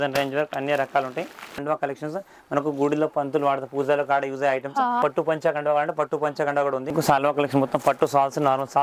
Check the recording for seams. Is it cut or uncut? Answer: cut